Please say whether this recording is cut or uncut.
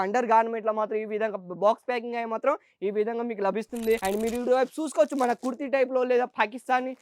cut